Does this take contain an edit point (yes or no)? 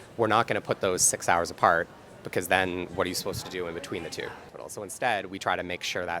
yes